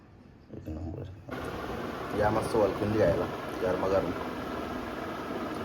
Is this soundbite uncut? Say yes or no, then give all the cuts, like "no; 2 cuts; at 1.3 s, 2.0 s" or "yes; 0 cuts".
no; 1 cut; at 1.3 s